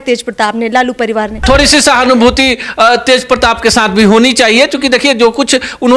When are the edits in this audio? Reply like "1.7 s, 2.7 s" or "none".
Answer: 1.4 s